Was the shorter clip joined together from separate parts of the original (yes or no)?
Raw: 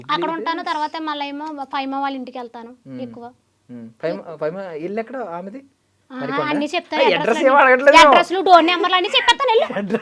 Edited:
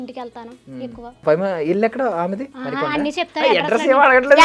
yes